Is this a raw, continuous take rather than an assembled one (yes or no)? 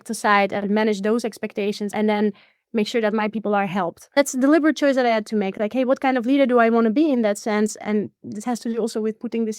no